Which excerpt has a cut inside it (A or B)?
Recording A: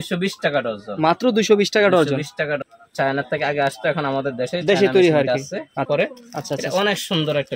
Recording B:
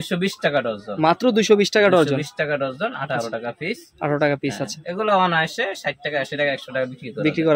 A